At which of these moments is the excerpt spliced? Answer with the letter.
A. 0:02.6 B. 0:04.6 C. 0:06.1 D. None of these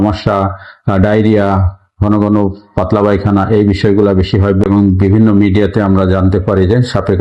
B